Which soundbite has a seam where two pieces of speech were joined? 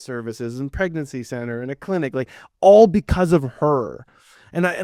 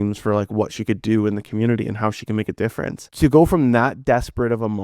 second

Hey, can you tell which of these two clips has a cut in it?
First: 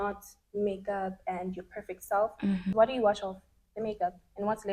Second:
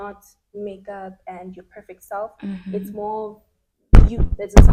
first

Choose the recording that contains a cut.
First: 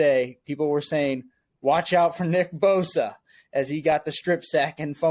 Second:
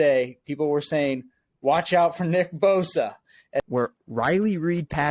second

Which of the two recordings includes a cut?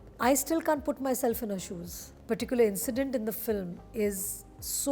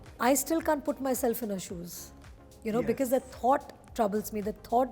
first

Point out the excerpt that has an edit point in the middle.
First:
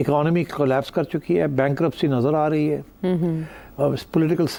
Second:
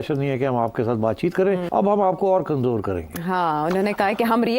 second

